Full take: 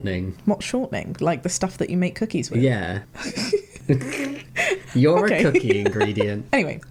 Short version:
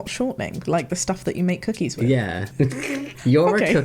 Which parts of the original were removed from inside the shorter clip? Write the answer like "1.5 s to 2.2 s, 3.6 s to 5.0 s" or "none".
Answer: 3.2 s to 4.3 s